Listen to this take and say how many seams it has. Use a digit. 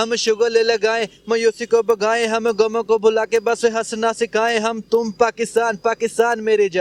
0